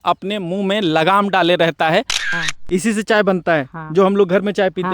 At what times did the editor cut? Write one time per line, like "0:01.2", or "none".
0:02.3